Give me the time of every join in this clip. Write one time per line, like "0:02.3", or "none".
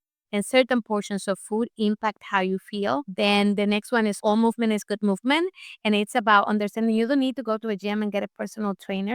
0:04.2